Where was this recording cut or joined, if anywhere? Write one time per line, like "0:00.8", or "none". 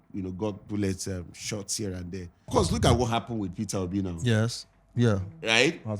0:02.5